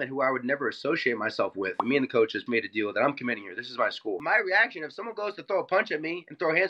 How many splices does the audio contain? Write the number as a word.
two